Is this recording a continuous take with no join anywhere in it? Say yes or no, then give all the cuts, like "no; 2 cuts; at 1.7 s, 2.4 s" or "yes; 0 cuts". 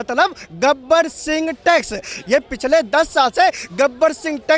yes; 0 cuts